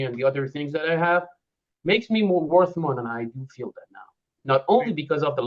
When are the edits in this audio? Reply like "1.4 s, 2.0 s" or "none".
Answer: none